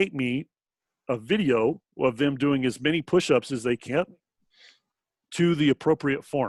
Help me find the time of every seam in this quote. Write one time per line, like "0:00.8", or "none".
none